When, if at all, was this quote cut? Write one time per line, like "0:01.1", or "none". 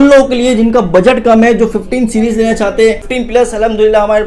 0:03.1